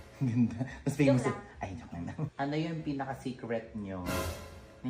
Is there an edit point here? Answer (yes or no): yes